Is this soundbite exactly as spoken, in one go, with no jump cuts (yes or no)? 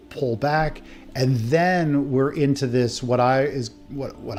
yes